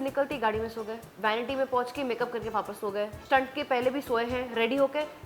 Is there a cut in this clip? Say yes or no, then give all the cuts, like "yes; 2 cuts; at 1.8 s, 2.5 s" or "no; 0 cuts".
yes; 2 cuts; at 1.0 s, 3.2 s